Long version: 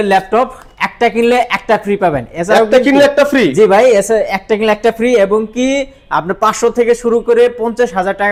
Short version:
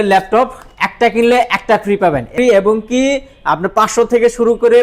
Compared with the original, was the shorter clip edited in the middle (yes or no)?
yes